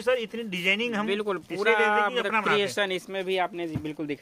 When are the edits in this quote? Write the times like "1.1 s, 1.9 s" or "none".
none